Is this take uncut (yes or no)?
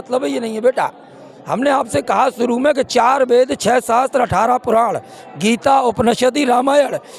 yes